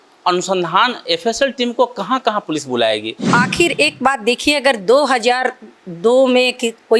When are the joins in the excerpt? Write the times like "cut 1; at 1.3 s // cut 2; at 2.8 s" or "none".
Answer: cut 1; at 3.3 s